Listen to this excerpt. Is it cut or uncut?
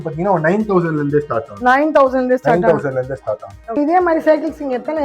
cut